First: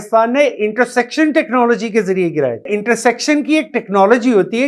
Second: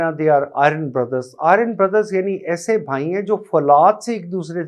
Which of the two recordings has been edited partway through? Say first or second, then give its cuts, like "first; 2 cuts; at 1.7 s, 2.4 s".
first; 1 cut; at 2.7 s